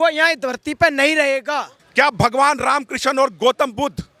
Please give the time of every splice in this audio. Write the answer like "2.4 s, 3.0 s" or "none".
1.8 s